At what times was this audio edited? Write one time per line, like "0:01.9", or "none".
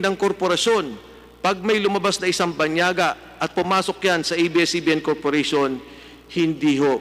none